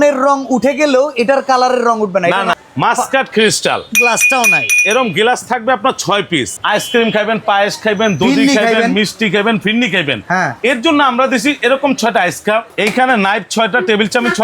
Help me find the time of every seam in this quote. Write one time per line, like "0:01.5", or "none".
0:02.5
0:06.5
0:12.7